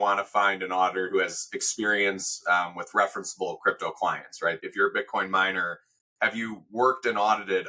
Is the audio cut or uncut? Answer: cut